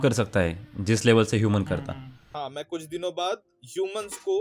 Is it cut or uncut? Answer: cut